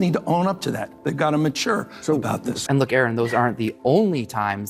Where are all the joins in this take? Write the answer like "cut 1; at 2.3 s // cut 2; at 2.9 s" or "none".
cut 1; at 2.6 s